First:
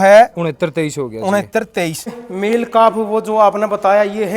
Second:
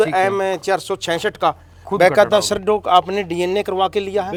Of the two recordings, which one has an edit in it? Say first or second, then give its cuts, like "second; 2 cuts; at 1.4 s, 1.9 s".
first; 1 cut; at 2.0 s